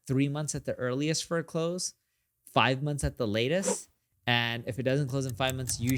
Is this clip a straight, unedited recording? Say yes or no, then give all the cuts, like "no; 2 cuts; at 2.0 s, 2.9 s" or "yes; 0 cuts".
yes; 0 cuts